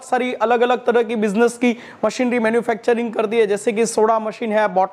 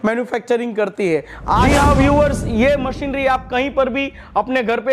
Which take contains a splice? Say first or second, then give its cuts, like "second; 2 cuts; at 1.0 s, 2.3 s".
second; 1 cut; at 1.7 s